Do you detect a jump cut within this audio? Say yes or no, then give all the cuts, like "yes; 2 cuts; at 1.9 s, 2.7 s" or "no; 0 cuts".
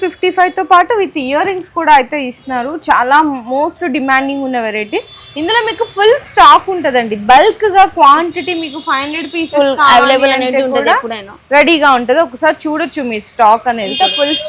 no; 0 cuts